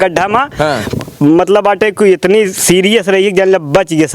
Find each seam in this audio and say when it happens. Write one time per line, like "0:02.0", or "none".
none